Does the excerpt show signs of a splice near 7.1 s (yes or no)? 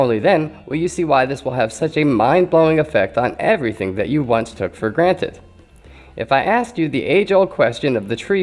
no